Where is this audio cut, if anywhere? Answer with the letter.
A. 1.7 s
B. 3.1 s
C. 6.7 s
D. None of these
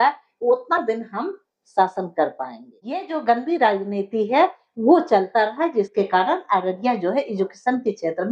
B